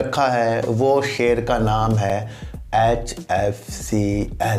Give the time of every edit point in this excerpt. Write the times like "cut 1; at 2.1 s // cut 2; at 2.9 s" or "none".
none